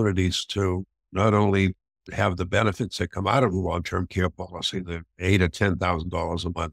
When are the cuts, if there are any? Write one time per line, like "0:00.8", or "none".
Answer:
none